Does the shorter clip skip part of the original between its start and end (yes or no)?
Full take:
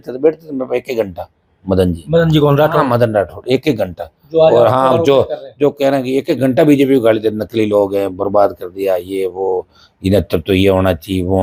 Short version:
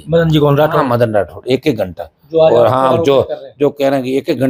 no